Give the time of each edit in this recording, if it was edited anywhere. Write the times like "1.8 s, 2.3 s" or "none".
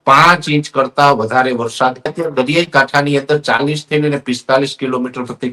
2.1 s